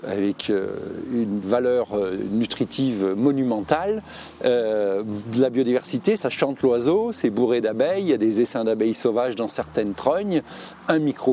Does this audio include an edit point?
no; 0 cuts

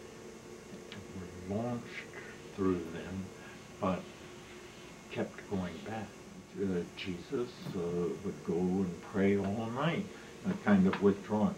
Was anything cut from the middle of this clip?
yes; 1 cut; at 6.4 s

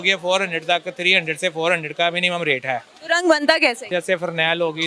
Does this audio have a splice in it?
yes; 2 cuts; at 2.9 s, 3.9 s

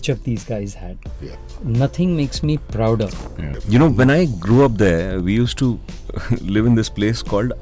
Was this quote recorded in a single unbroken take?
no; 1 cut; at 3.4 s

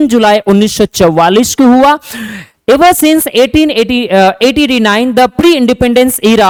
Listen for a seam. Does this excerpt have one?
no; 0 cuts

